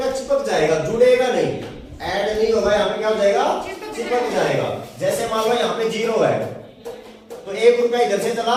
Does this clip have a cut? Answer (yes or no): no